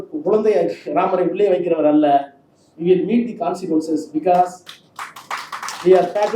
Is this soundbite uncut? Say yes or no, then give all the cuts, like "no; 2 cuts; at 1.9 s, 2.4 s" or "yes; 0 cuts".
yes; 0 cuts